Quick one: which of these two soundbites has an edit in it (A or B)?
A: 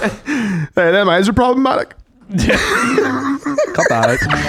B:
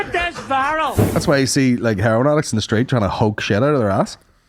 B